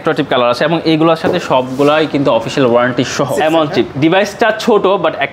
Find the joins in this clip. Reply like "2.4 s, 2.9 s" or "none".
3.3 s